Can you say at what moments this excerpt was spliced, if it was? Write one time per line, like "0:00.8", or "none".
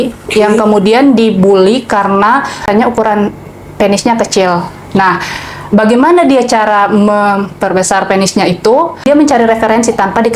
0:02.6
0:09.1